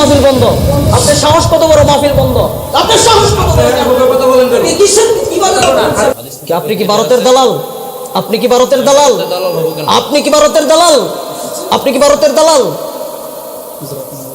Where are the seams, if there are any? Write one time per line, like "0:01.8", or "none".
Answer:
0:06.1